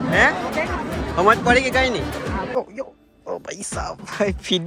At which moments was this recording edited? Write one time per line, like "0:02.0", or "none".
0:02.5